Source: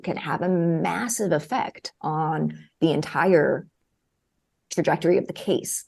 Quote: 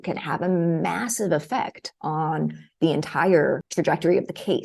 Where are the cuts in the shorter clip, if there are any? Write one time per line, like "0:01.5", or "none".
0:03.7